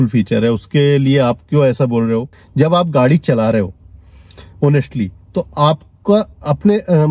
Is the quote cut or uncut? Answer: cut